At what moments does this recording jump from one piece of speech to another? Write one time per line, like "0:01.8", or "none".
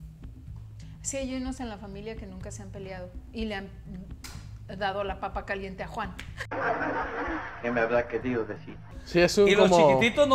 0:09.0